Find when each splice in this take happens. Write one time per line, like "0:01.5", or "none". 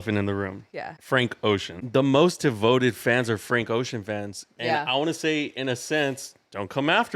0:00.9
0:01.8